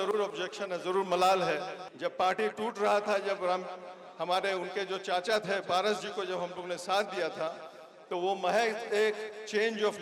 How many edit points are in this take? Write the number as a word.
one